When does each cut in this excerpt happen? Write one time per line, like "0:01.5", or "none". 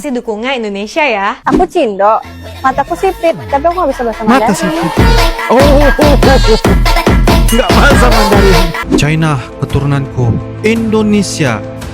0:01.4
0:08.8